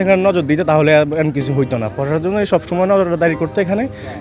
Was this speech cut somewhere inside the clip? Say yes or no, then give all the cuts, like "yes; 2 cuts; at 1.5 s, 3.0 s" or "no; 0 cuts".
no; 0 cuts